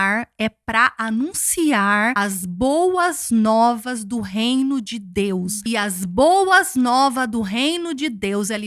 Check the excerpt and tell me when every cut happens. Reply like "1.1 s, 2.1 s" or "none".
2.2 s, 5.6 s